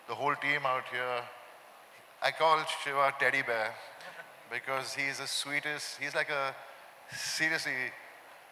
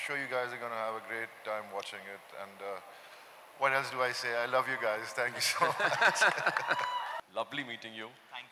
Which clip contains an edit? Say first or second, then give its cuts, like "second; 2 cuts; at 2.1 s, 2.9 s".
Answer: second; 1 cut; at 7.2 s